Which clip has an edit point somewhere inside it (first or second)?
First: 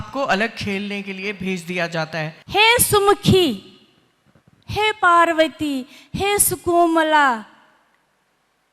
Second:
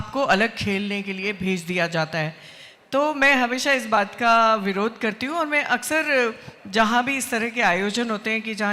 first